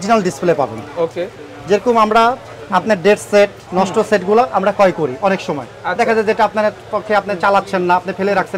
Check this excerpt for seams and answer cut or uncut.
uncut